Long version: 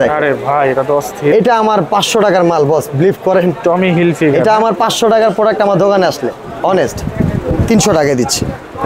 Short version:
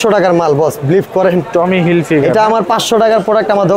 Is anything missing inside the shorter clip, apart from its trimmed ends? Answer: no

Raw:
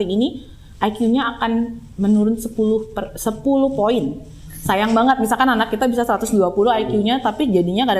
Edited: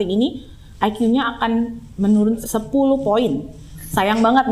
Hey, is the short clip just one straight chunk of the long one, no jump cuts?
no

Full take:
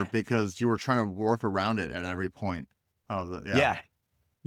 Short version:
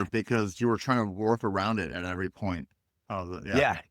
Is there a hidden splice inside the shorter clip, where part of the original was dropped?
no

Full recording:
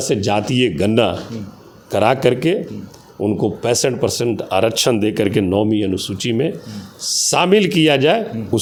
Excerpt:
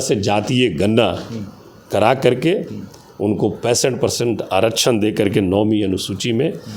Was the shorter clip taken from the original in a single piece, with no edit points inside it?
yes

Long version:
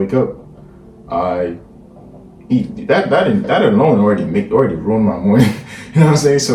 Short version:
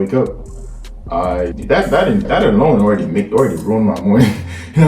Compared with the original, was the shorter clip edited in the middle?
yes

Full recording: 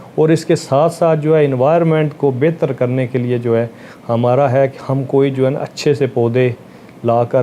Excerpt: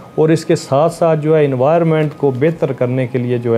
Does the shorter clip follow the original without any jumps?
yes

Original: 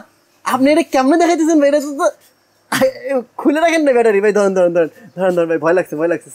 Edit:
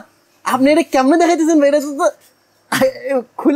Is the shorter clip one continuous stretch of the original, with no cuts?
yes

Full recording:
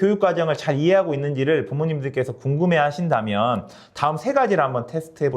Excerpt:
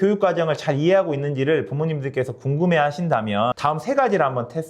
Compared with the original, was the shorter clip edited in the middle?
yes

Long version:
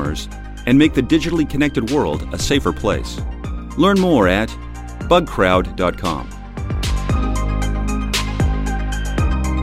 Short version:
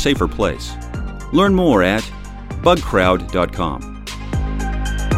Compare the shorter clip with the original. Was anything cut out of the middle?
yes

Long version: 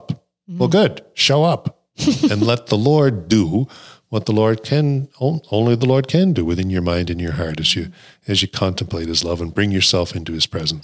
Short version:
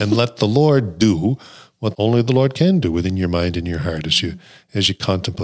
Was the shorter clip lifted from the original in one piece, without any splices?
no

